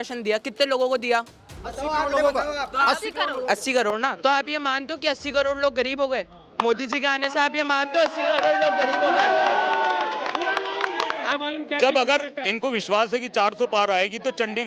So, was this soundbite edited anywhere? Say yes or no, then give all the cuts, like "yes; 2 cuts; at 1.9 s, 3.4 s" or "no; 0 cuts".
yes; 1 cut; at 11.3 s